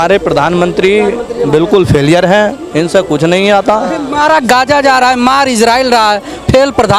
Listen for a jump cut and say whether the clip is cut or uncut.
uncut